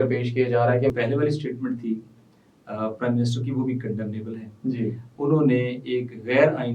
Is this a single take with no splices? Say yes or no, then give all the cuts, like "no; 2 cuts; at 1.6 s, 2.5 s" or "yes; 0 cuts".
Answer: no; 1 cut; at 0.9 s